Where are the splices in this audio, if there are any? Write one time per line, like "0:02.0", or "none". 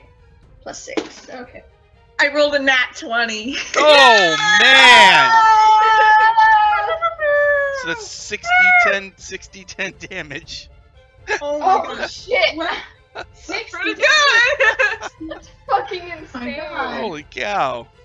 0:01.3